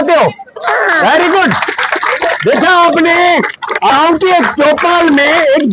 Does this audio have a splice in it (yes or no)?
yes